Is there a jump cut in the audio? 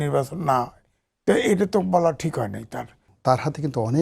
yes; 1 cut; at 3.1 s

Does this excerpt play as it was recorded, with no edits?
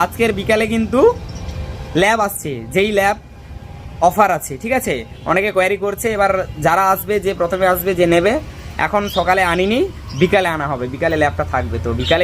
yes; 0 cuts

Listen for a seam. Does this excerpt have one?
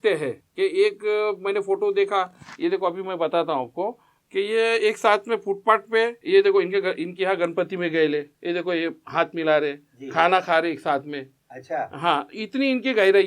no; 0 cuts

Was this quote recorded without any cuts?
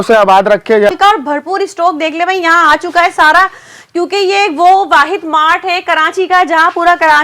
no; 1 cut; at 0.9 s

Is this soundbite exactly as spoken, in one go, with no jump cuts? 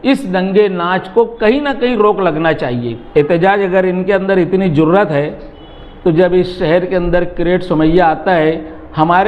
no; 1 cut; at 3.0 s

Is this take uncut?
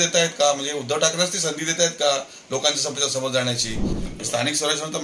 no; 1 cut; at 4.0 s

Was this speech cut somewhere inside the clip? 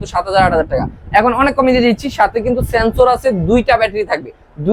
no; 0 cuts

